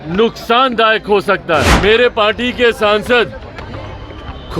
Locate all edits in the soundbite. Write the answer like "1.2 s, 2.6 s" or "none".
1.7 s